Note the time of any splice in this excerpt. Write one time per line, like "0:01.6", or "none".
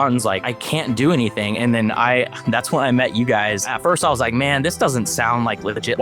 0:03.6